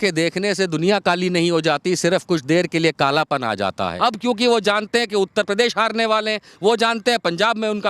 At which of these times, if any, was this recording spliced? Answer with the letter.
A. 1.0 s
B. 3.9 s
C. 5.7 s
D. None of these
B